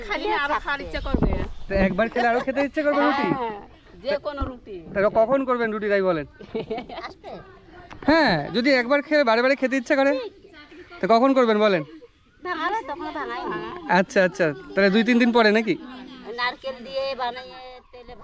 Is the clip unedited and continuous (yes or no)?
yes